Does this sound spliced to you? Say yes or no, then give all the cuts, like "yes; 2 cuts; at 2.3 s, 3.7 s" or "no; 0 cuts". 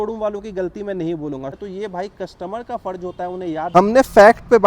yes; 2 cuts; at 1.6 s, 3.7 s